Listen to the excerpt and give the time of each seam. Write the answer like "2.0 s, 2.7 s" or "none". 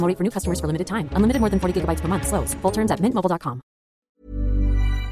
4.2 s